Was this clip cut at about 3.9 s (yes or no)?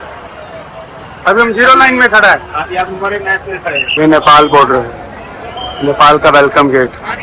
yes